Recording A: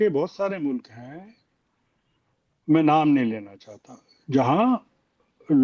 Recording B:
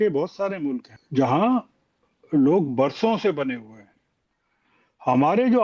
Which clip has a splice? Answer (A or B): B